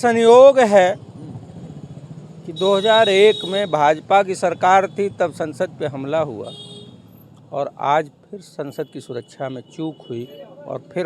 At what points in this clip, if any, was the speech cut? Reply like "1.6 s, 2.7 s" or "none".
none